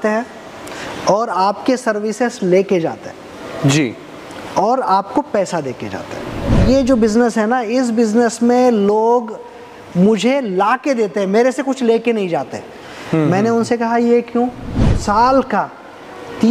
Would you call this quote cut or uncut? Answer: cut